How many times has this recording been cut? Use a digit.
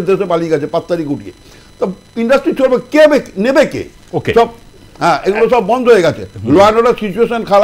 0